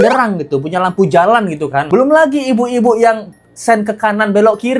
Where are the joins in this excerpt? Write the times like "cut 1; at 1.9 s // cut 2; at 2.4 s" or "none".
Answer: cut 1; at 1.9 s